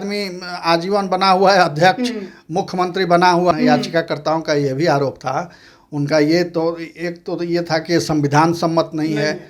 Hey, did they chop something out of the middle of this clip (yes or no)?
yes